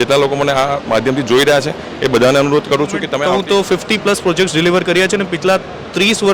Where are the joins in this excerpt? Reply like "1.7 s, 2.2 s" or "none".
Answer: 3.1 s